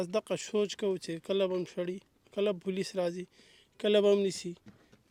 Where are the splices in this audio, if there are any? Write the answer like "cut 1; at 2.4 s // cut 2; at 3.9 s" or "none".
none